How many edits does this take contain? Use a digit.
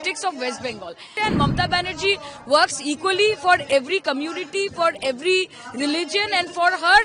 1